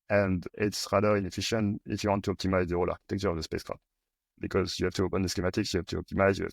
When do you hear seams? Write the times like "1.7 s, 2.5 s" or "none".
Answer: 4.3 s